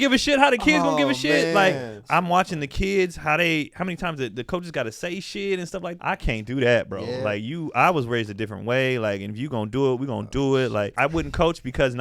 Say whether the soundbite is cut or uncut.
cut